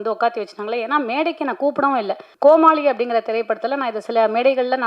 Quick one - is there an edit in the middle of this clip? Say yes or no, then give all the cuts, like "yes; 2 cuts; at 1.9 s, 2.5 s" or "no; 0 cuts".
yes; 1 cut; at 2.2 s